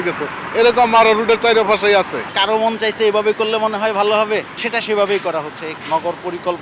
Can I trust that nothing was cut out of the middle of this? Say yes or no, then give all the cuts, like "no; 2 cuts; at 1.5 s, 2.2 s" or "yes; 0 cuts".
no; 3 cuts; at 2.3 s, 4.6 s, 5.7 s